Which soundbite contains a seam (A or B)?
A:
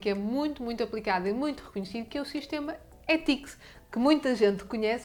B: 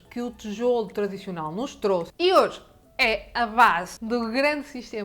B